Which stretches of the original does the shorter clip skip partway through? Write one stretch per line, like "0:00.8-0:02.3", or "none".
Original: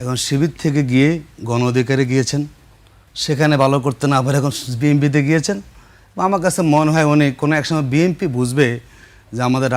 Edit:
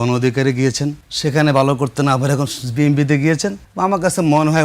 0:02.6-0:03.1
0:05.7-0:06.0